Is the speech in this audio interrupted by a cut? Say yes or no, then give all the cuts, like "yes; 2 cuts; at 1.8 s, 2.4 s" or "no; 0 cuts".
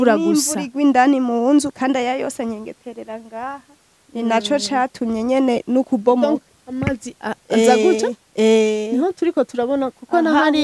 no; 0 cuts